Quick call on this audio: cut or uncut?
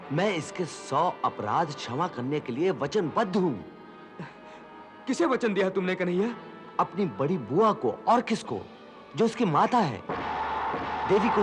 uncut